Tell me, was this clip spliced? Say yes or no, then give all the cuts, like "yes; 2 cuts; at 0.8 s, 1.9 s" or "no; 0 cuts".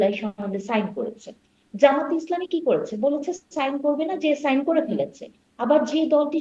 no; 0 cuts